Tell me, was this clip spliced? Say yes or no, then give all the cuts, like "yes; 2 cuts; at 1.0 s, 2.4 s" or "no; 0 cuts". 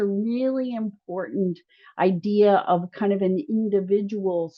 no; 0 cuts